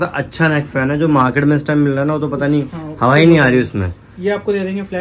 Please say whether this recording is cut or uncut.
uncut